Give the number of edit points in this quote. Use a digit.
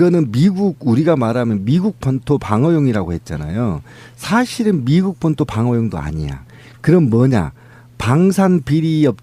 1